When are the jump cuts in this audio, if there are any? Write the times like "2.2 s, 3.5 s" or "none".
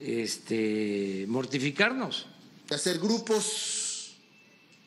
2.8 s